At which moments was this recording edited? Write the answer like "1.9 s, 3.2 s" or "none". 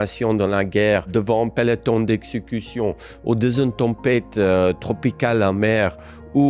none